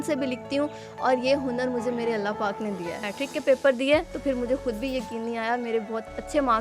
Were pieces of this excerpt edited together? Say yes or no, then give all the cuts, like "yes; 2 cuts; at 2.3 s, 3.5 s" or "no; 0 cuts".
yes; 1 cut; at 3.1 s